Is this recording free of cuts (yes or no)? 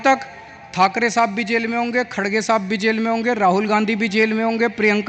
yes